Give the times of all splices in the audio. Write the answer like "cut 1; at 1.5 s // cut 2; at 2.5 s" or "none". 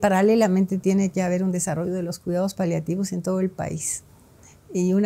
none